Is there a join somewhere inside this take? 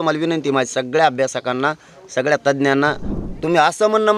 yes; 1 cut; at 3.1 s

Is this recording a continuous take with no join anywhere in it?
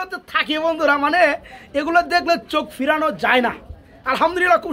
yes; 0 cuts

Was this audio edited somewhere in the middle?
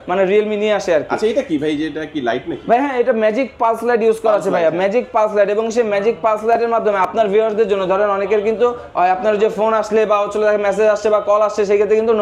no; 0 cuts

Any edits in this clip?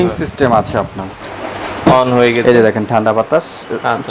yes; 1 cut; at 1.2 s

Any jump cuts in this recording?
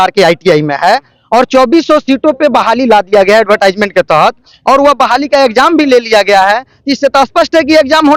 no; 0 cuts

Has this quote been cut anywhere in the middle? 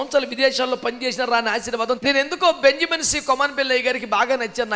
yes; 1 cut; at 2.0 s

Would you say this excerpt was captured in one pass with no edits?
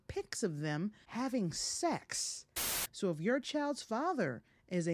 no; 2 cuts; at 1.0 s, 2.7 s

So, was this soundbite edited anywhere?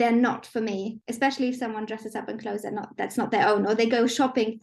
yes; 1 cut; at 0.9 s

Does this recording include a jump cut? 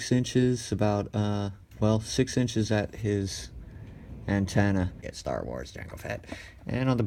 no; 0 cuts

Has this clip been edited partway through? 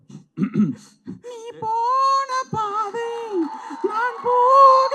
no; 0 cuts

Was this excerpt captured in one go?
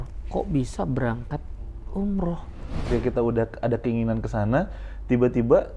no; 1 cut; at 2.9 s

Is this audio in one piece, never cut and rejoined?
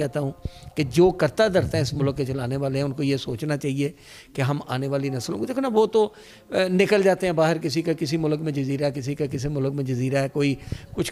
yes; 0 cuts

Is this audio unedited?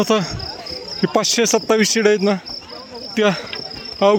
yes; 0 cuts

